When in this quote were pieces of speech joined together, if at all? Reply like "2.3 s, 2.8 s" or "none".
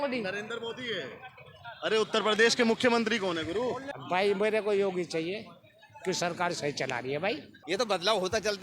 3.9 s, 7.5 s